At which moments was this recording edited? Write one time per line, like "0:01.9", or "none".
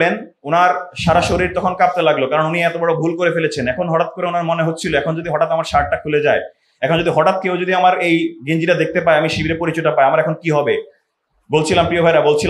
none